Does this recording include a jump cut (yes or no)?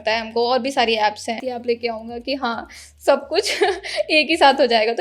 yes